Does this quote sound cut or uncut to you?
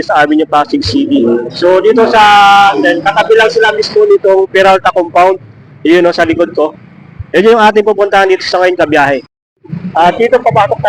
uncut